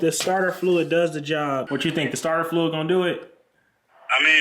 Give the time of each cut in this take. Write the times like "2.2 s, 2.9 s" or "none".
1.7 s